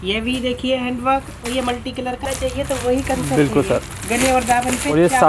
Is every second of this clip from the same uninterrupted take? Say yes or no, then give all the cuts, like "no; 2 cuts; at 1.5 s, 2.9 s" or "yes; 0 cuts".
no; 1 cut; at 2.2 s